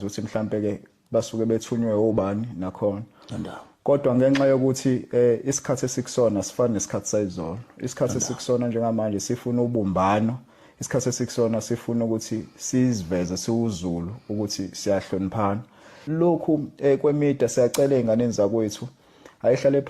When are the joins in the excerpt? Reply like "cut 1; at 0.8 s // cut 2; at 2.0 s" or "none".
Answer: cut 1; at 16.1 s

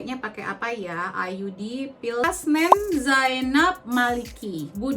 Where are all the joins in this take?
cut 1; at 2.2 s

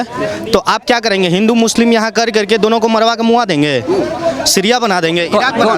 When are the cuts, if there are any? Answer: none

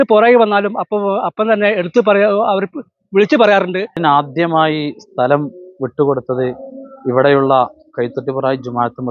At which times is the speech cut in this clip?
cut 1; at 4.0 s

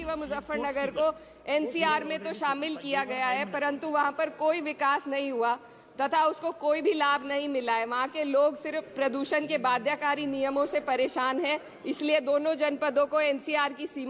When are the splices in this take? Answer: none

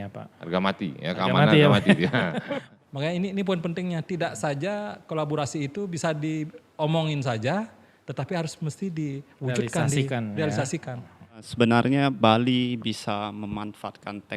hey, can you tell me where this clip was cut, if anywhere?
cut 1; at 2.7 s // cut 2; at 11.4 s

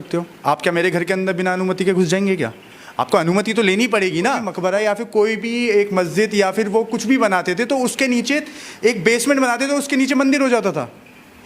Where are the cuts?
cut 1; at 4.5 s

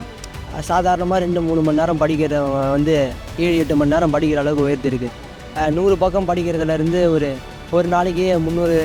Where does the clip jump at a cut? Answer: none

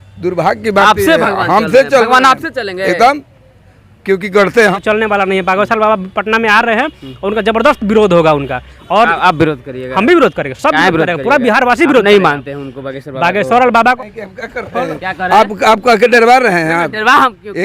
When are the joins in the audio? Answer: cut 1; at 4.8 s // cut 2; at 14.0 s

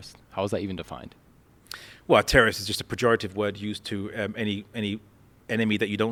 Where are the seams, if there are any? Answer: none

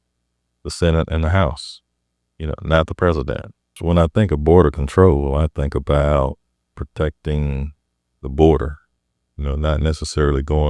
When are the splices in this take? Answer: cut 1; at 3.8 s

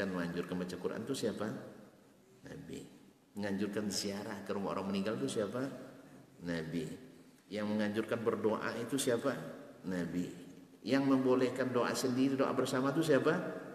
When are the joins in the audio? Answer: cut 1; at 7.4 s

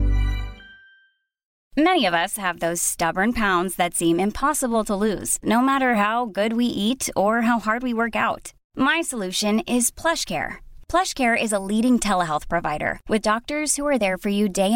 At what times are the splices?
cut 1; at 1.6 s

